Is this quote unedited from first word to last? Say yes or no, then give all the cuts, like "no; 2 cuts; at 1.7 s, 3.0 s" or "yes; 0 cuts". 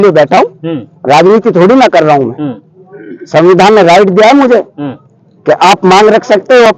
yes; 0 cuts